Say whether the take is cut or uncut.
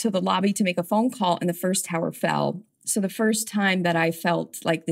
uncut